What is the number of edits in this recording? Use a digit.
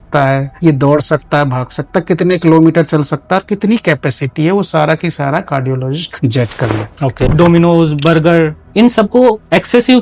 2